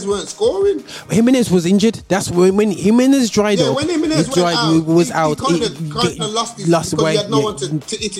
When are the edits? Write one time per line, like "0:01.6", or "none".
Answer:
none

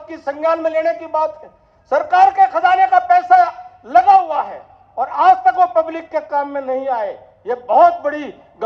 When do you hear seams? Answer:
none

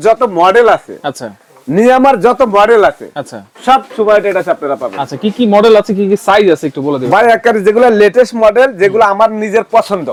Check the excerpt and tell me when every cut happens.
none

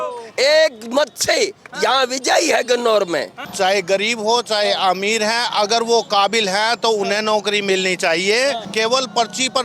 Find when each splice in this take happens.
0:03.4
0:08.6

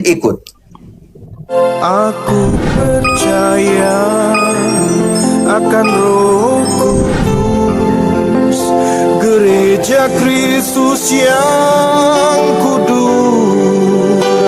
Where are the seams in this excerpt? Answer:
0:01.4

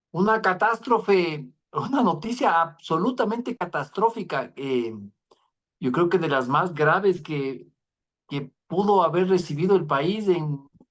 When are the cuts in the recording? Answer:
none

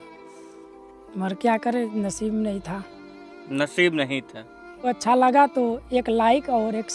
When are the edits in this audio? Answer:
0:04.8

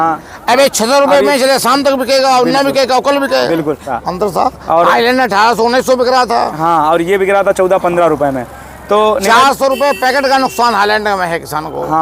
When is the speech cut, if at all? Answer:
0:03.9

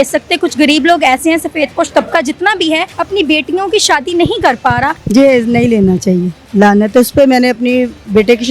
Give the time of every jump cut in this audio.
0:02.9
0:05.0

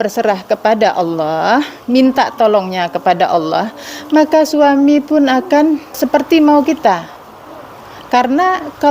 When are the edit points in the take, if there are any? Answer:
0:06.0

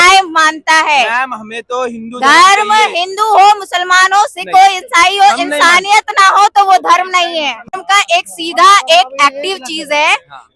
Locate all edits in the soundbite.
0:07.7

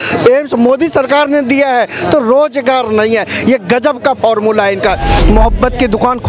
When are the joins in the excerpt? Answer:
0:05.2

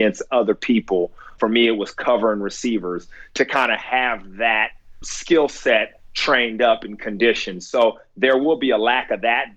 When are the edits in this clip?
0:01.3
0:05.0

